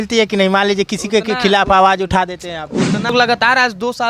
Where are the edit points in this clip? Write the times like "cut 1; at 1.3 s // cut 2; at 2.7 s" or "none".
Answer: cut 1; at 3.1 s